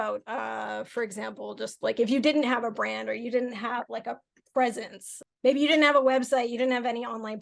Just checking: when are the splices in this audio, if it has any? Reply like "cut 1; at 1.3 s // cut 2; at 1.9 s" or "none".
none